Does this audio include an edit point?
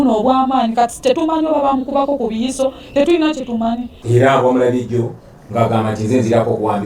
yes; 1 cut; at 3.9 s

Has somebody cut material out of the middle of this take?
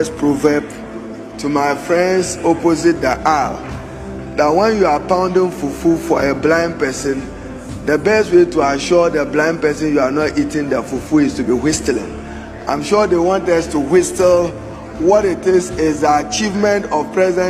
no; 0 cuts

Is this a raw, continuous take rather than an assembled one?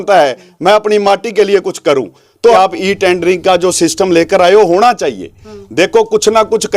no; 1 cut; at 2.6 s

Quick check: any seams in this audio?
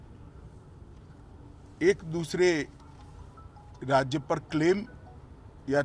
no; 0 cuts

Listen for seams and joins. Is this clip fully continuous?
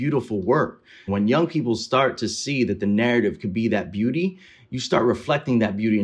no; 1 cut; at 1.1 s

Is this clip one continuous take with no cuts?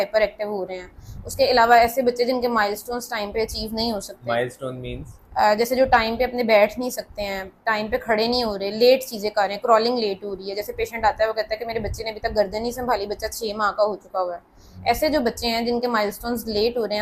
yes; 0 cuts

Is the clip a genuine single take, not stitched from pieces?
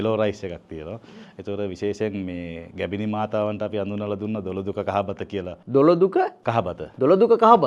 yes; 0 cuts

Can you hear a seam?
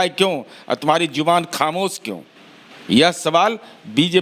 no; 0 cuts

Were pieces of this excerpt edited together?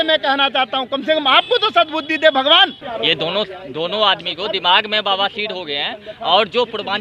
yes; 1 cut; at 2.8 s

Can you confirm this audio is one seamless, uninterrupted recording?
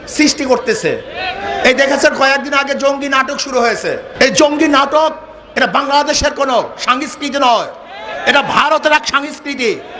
no; 1 cut; at 4.1 s

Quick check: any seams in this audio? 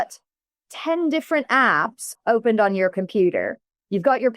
yes; 1 cut; at 2.1 s

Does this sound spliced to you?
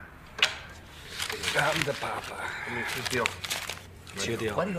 no; 0 cuts

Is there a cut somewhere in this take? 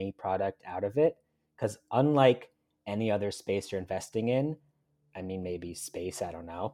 no; 0 cuts

